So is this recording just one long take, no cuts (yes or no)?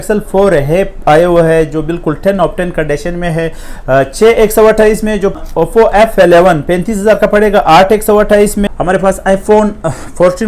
no